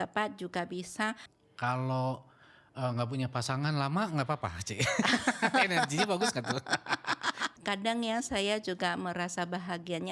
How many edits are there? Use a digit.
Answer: 2